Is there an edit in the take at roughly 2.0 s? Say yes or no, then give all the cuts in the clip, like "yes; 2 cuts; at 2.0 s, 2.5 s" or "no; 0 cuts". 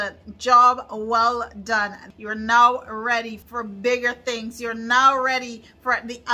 yes; 2 cuts; at 2.0 s, 3.4 s